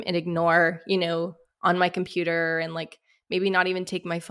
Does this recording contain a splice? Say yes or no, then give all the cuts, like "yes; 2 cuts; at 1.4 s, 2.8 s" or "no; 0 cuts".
yes; 1 cut; at 1.4 s